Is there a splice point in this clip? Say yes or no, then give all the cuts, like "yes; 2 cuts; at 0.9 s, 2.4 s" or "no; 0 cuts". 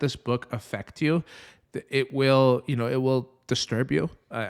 no; 0 cuts